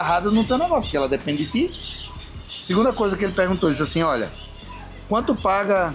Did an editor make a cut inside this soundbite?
no; 0 cuts

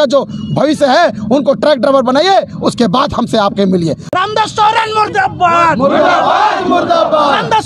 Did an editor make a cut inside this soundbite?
yes; 1 cut; at 4.0 s

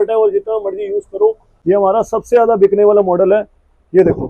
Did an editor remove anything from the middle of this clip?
yes; 1 cut; at 1.5 s

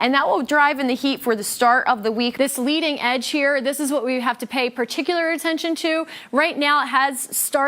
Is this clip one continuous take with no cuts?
no; 1 cut; at 2.3 s

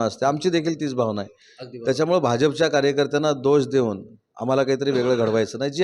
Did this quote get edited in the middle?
no; 0 cuts

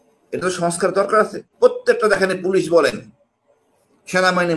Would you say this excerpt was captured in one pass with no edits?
no; 1 cut; at 1.4 s

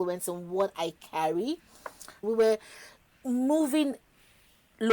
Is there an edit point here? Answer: yes; 1 cut; at 2.2 s

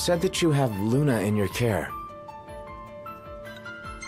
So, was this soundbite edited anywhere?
yes; 1 cut; at 1.9 s

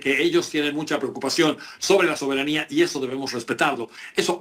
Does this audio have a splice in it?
no; 0 cuts

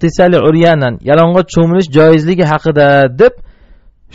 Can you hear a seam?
no; 0 cuts

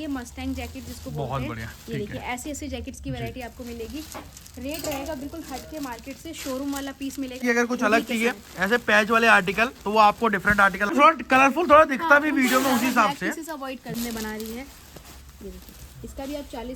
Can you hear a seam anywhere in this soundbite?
yes; 3 cuts; at 7.4 s, 10.9 s, 14.0 s

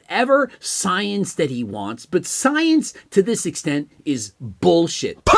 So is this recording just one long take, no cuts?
yes; 0 cuts

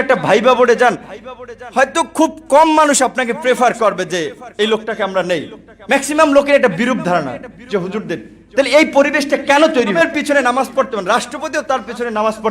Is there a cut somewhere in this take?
yes; 1 cut; at 10.0 s

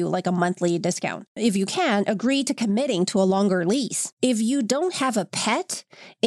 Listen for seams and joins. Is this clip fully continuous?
no; 2 cuts; at 1.3 s, 4.1 s

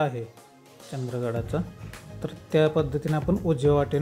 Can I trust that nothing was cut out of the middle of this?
yes; 0 cuts

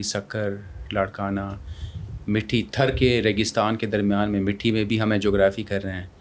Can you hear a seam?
no; 0 cuts

